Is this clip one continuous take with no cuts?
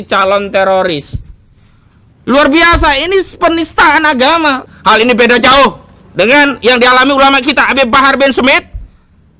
no; 1 cut; at 4.6 s

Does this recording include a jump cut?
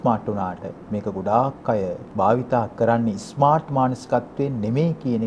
yes; 1 cut; at 2.0 s

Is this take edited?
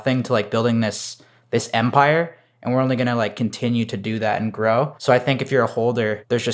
no; 0 cuts

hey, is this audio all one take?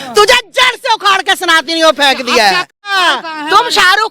no; 1 cut; at 2.9 s

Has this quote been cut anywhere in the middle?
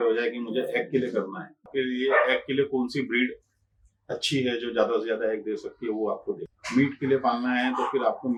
no; 0 cuts

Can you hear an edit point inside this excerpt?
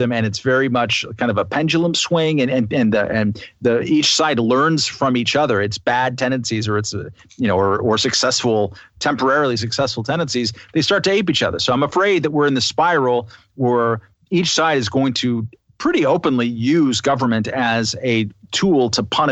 no; 0 cuts

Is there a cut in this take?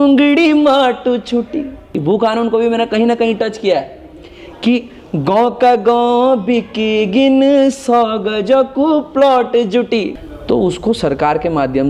yes; 2 cuts; at 1.9 s, 10.2 s

